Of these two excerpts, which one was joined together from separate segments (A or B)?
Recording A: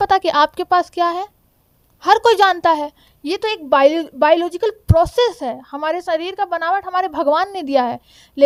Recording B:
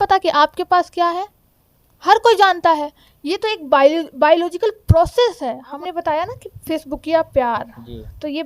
B